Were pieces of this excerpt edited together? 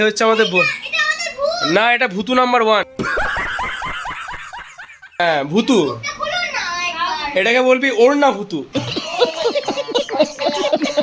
no; 0 cuts

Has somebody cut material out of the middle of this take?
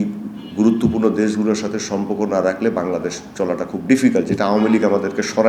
no; 0 cuts

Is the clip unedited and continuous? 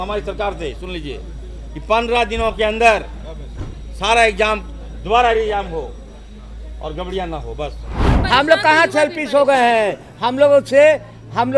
no; 1 cut; at 8.0 s

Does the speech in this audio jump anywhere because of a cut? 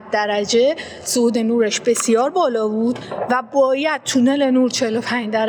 no; 0 cuts

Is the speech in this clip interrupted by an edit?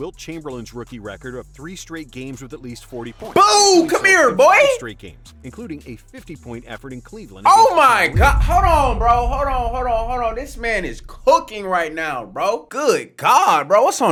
no; 0 cuts

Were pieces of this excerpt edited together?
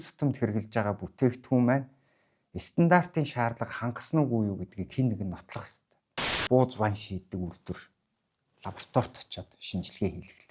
yes; 1 cut; at 6.4 s

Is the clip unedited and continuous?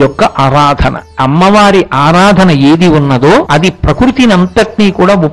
no; 2 cuts; at 1.1 s, 3.5 s

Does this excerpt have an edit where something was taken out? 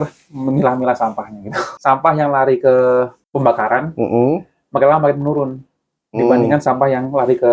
yes; 2 cuts; at 1.6 s, 3.2 s

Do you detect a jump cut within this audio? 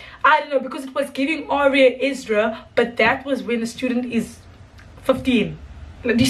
no; 0 cuts

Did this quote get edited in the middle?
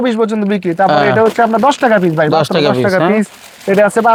no; 0 cuts

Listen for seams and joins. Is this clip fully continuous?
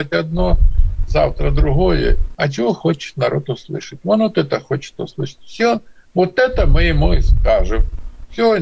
no; 1 cut; at 2.2 s

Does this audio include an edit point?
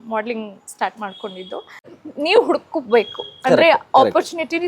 yes; 1 cut; at 2.0 s

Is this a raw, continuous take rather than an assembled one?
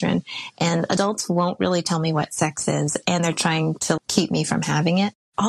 yes; 0 cuts

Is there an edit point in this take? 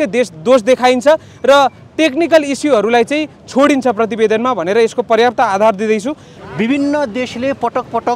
yes; 1 cut; at 6.3 s

